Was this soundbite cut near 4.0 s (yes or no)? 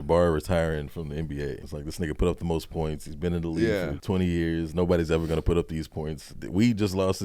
yes